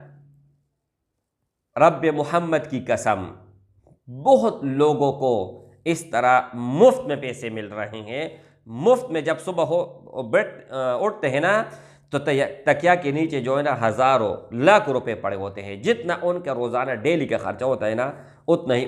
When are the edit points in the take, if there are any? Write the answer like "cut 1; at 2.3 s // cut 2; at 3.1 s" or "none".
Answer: none